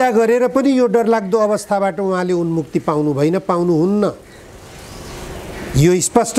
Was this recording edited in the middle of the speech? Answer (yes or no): no